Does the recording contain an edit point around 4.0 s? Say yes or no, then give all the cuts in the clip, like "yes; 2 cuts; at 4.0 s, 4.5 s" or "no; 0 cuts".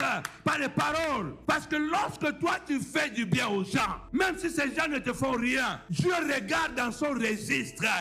no; 1 cut; at 1.4 s